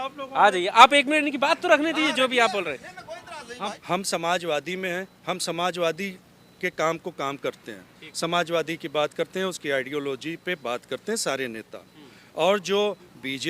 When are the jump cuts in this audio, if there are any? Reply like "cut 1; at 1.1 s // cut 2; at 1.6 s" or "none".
cut 1; at 3.8 s